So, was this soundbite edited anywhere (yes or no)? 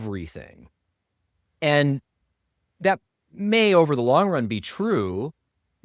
no